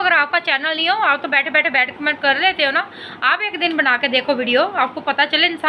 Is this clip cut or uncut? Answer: uncut